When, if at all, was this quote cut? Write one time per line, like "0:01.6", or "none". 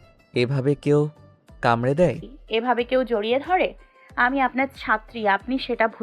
0:02.3